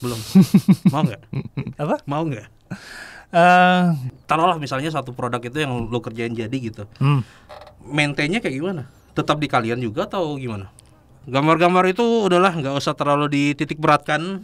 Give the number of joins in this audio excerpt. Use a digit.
2